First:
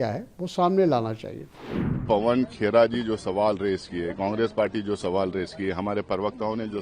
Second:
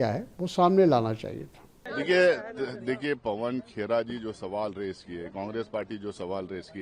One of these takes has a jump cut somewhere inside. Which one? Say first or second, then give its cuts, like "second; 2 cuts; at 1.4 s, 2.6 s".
first; 1 cut; at 2.0 s